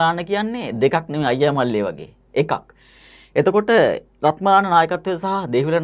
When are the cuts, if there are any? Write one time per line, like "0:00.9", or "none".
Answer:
none

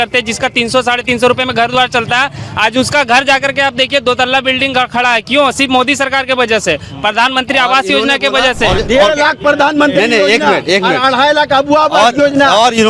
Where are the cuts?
0:08.8

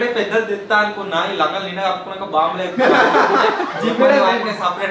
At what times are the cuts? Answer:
none

